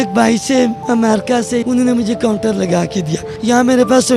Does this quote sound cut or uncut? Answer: cut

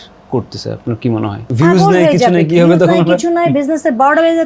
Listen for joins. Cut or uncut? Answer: cut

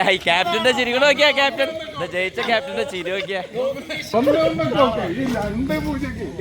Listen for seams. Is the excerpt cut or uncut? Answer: cut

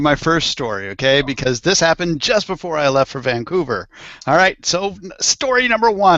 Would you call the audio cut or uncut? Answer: uncut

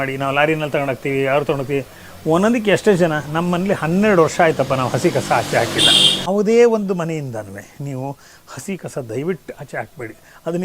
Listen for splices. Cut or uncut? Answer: cut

